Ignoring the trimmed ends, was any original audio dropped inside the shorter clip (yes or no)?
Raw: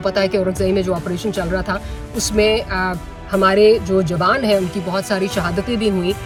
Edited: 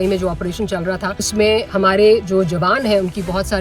yes